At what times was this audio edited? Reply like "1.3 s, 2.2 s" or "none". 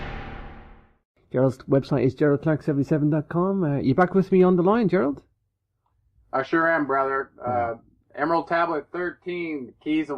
none